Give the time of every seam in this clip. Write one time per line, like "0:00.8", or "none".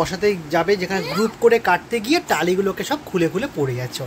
none